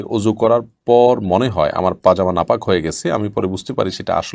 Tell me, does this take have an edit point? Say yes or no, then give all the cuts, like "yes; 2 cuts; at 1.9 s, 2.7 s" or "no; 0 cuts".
no; 0 cuts